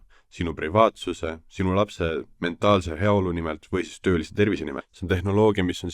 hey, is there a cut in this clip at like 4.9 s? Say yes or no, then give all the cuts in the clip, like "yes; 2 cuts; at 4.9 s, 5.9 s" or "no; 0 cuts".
yes; 1 cut; at 4.9 s